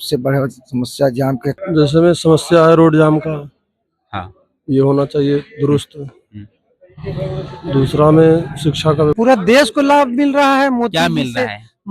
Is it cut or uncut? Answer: cut